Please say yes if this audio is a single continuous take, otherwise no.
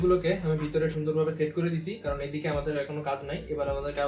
yes